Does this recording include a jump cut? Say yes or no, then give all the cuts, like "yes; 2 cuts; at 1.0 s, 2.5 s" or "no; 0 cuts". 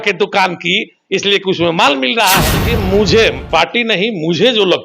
yes; 1 cut; at 2.6 s